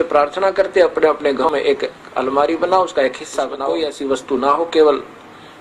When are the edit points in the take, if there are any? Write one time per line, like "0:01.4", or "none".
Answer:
0:01.5
0:03.6